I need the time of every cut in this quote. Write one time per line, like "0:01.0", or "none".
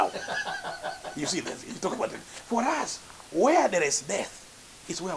none

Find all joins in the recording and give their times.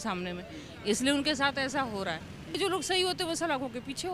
0:02.5

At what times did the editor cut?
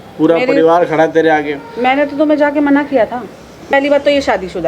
0:03.7

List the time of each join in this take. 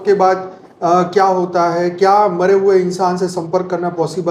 none

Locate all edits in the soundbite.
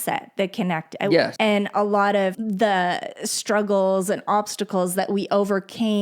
0:01.3
0:02.4

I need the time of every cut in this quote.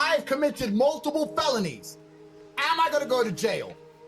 0:01.9

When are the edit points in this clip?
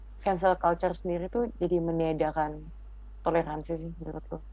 none

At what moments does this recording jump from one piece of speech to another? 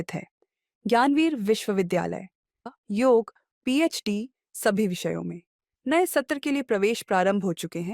0:02.7

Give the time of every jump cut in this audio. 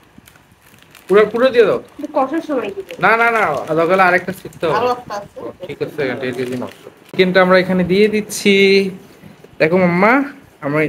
0:07.1

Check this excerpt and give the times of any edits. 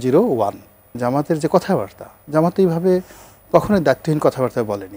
0:00.9

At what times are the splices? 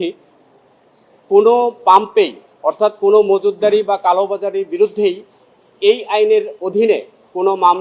none

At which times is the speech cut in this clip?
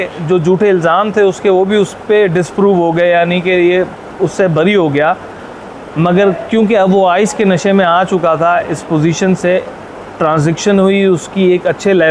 none

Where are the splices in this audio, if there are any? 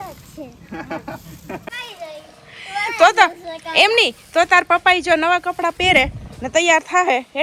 0:01.6

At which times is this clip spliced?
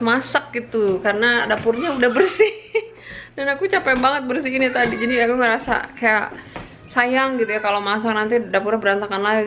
none

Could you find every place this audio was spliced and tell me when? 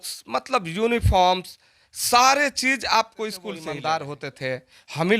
0:03.7

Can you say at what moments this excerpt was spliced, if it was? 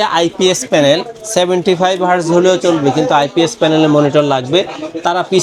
none

